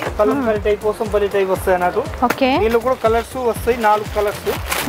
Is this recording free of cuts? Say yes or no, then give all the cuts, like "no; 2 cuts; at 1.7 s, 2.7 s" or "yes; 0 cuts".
yes; 0 cuts